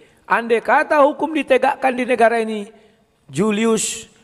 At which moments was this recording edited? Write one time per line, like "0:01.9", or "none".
none